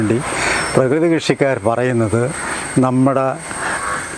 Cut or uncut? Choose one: uncut